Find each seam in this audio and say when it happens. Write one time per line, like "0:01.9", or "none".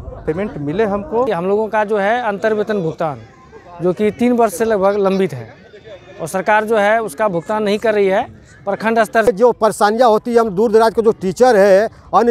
0:01.3
0:09.3